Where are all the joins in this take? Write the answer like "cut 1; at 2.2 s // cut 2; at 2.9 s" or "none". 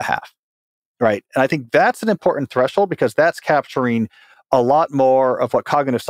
none